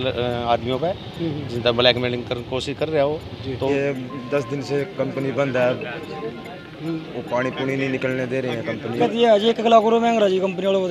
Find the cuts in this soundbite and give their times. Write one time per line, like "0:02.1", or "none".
0:03.7
0:09.0

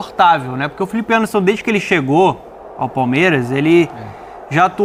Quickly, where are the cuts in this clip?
none

